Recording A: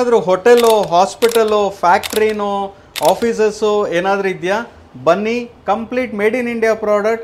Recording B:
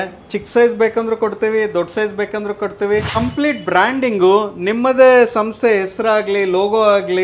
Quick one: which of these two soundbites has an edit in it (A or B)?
B